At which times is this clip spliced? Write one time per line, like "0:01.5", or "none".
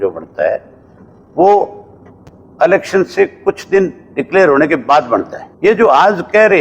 0:05.4